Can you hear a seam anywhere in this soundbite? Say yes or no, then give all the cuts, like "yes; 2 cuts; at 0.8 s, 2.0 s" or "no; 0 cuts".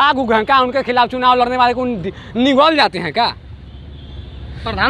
no; 0 cuts